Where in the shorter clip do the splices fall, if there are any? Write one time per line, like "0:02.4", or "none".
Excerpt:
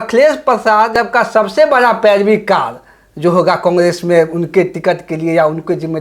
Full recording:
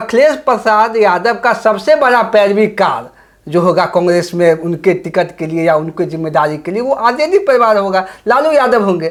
0:00.9